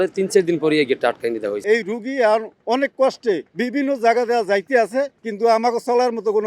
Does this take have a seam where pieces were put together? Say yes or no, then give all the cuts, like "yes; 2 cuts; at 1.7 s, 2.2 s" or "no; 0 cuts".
yes; 3 cuts; at 1.6 s, 3.5 s, 5.2 s